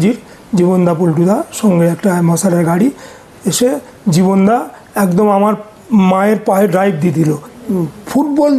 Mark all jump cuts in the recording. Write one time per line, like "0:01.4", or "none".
0:03.2
0:07.5